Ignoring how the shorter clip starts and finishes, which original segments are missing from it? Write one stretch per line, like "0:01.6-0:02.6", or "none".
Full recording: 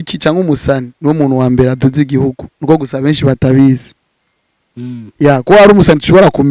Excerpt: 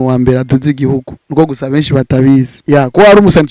0:03.9-0:05.1

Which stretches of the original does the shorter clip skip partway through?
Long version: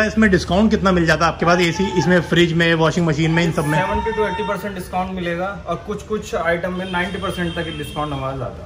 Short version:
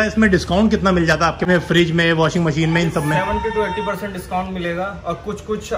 0:01.4-0:02.1

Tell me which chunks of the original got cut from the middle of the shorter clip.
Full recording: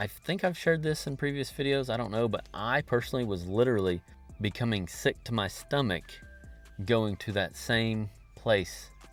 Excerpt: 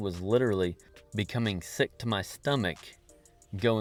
none

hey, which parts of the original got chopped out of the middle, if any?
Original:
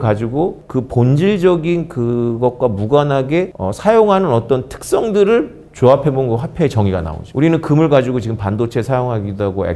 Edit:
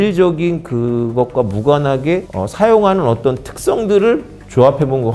none

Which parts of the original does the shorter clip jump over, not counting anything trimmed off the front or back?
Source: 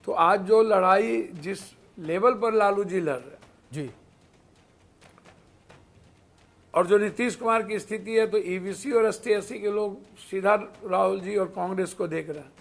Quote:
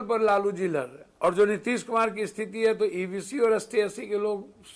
0:03.3-0:06.5

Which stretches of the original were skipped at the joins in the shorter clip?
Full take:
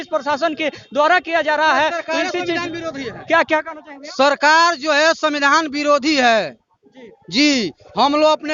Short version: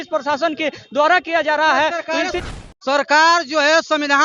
0:02.4-0:03.7

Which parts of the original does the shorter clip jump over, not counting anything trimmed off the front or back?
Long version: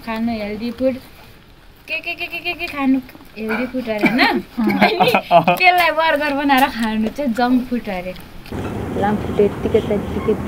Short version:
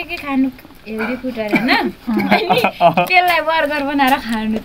none

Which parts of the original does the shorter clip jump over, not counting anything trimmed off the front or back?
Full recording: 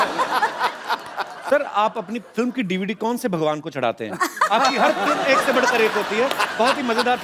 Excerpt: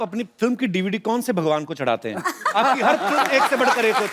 none

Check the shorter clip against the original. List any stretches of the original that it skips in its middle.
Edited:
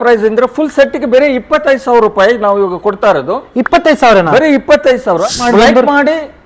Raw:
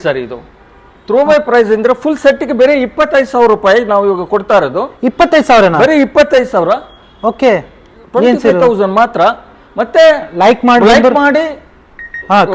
0:06.9-0:10.7

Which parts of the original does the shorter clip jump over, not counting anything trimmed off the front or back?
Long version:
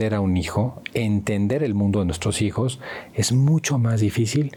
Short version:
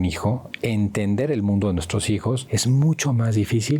0:02.8-0:03.1

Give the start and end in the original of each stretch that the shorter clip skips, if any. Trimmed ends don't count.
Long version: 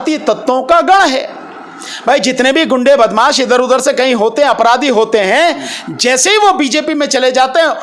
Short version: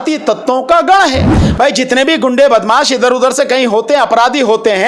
0:01.4-0:01.9

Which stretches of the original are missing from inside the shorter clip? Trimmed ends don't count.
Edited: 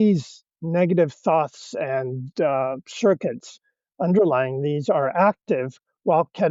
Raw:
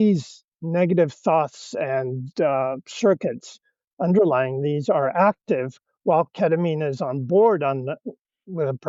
none

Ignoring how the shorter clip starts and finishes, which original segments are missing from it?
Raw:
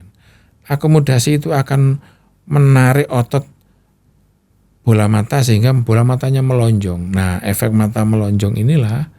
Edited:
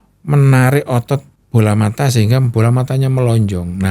0:03.6-0:04.7

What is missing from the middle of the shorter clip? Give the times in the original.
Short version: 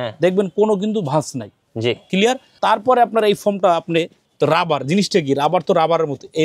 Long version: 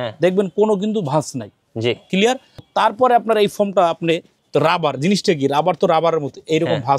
0:02.5-0:02.6

